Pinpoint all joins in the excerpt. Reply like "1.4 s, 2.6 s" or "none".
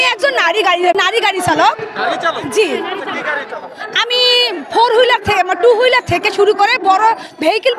0.9 s

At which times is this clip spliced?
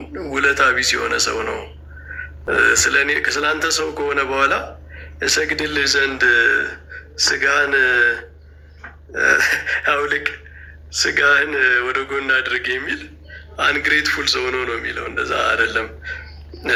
none

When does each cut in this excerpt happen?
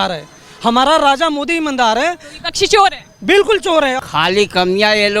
4.0 s

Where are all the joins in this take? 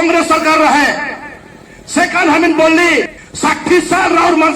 3.2 s

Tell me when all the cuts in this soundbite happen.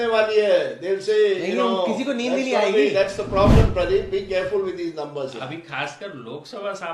none

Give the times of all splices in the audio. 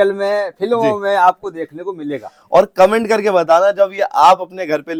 none

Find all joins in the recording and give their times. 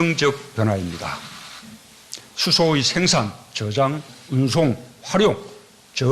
4.1 s

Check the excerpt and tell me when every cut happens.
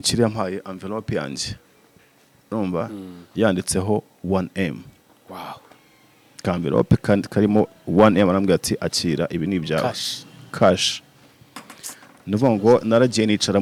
none

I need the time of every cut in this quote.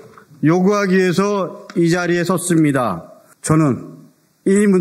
3.3 s

